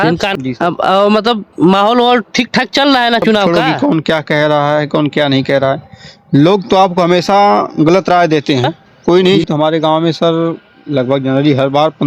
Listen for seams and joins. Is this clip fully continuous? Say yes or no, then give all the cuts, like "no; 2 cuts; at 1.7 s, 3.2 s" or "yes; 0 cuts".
no; 2 cuts; at 3.5 s, 9.4 s